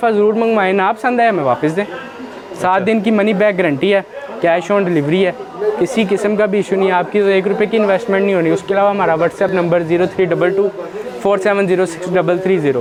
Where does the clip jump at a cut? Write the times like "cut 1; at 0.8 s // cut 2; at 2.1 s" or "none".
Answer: none